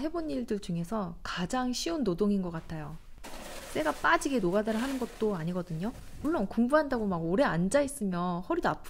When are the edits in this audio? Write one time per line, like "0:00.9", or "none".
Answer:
none